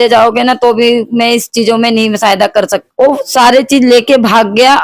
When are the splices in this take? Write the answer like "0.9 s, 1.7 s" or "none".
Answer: 2.8 s